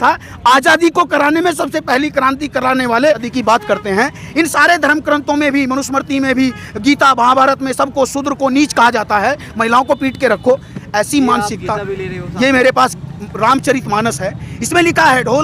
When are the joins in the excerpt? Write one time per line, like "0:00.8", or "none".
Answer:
0:03.3